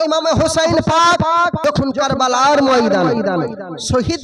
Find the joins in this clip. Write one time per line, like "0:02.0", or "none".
0:01.6